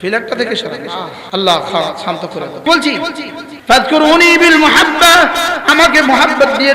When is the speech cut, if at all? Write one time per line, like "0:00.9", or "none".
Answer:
0:01.2
0:02.7
0:03.4